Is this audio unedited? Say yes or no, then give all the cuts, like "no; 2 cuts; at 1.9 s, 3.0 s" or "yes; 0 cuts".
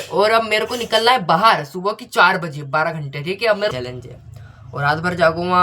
no; 1 cut; at 3.7 s